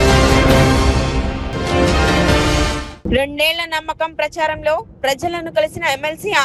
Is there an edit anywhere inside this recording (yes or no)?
no